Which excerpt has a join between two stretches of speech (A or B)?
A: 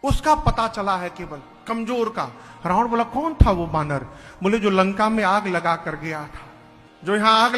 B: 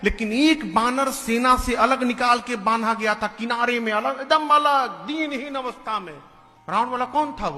A